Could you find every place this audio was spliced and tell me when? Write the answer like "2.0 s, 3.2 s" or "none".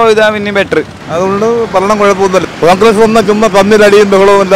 1.0 s, 2.4 s